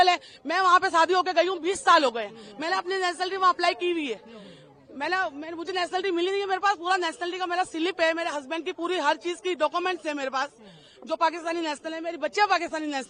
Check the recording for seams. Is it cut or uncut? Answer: uncut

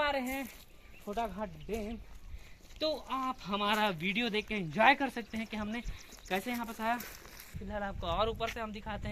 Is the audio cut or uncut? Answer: cut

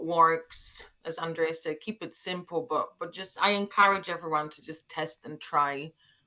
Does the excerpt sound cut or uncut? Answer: uncut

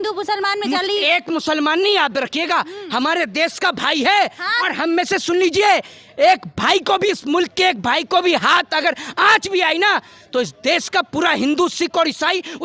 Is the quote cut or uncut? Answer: uncut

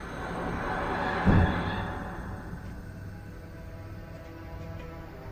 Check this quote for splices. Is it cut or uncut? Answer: uncut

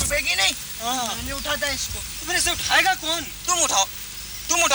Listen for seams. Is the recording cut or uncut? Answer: uncut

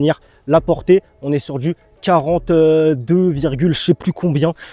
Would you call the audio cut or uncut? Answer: uncut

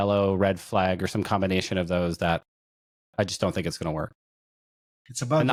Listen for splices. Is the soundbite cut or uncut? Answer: uncut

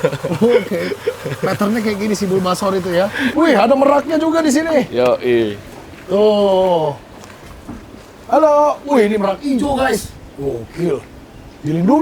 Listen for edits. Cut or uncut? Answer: cut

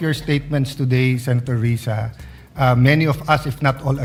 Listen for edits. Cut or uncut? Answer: uncut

